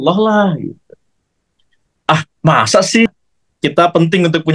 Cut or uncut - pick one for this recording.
cut